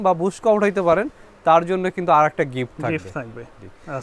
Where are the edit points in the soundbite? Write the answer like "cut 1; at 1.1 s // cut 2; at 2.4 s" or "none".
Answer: none